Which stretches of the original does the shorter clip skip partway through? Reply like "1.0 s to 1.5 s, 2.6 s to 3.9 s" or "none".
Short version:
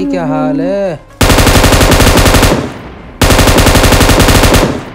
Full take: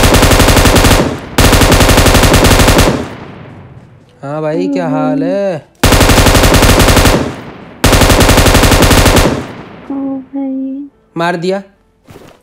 none